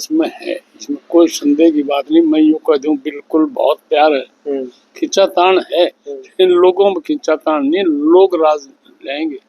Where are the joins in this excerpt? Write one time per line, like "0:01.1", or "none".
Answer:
none